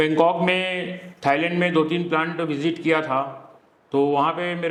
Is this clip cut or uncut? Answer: uncut